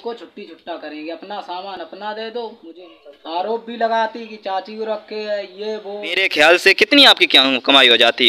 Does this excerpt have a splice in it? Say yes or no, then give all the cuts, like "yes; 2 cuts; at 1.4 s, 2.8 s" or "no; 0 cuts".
yes; 2 cuts; at 2.7 s, 6.2 s